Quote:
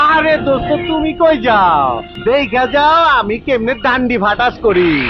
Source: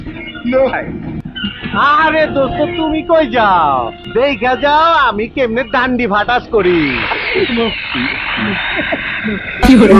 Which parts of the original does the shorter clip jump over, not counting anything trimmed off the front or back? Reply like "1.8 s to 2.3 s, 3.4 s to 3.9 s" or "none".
none